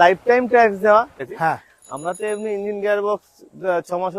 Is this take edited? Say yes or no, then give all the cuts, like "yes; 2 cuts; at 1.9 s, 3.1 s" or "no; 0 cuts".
yes; 1 cut; at 1.2 s